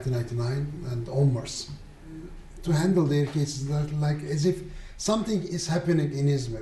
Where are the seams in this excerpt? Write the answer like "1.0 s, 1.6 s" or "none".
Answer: 1.3 s